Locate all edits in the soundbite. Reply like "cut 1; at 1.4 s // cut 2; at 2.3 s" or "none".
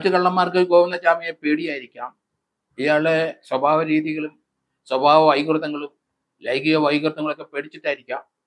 none